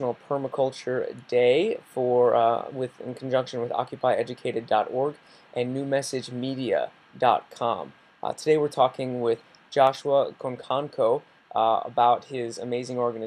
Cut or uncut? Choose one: uncut